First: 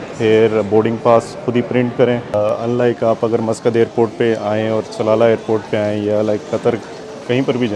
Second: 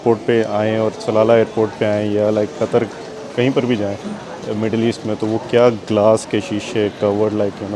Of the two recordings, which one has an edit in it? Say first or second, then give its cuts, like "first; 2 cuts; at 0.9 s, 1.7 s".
first; 1 cut; at 2.3 s